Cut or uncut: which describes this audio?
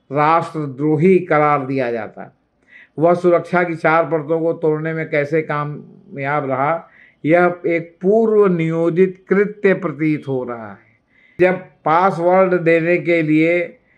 cut